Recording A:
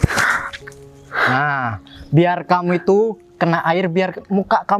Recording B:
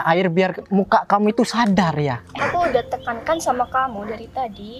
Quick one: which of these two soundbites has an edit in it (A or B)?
B